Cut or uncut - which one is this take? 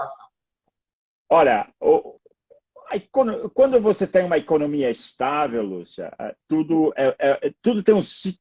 cut